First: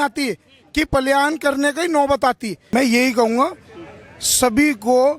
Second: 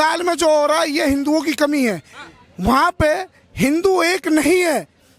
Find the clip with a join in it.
first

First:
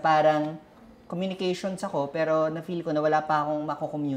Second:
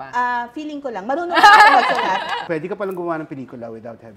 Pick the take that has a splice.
second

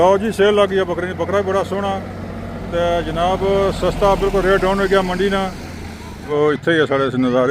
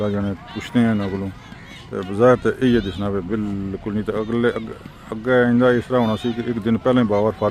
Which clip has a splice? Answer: first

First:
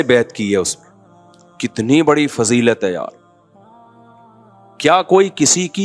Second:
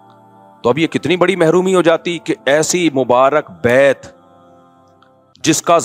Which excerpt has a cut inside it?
first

